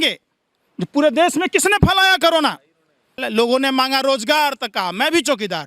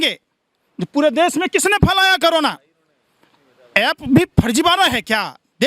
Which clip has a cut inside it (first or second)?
first